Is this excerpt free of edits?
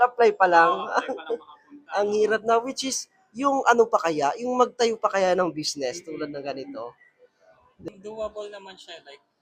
no; 1 cut; at 7.9 s

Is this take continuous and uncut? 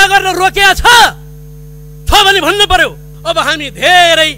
no; 1 cut; at 3.1 s

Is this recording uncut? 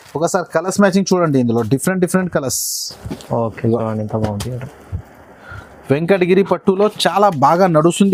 yes; 0 cuts

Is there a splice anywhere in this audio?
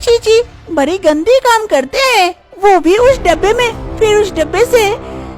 no; 0 cuts

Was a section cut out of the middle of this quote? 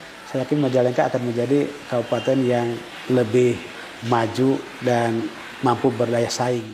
yes; 2 cuts; at 2.9 s, 4.7 s

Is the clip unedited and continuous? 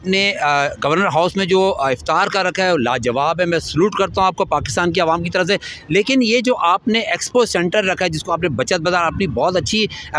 yes; 0 cuts

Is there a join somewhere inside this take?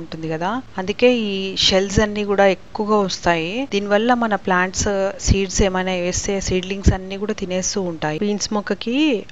yes; 1 cut; at 8.2 s

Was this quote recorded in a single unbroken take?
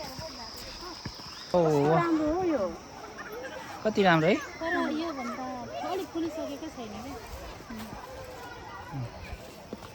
no; 1 cut; at 1.5 s

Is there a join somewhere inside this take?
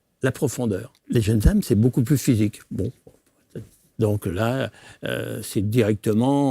yes; 1 cut; at 0.9 s

